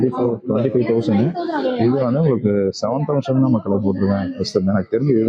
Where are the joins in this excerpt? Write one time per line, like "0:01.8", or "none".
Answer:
none